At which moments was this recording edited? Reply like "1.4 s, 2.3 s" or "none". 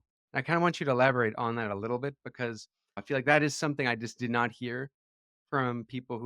3.0 s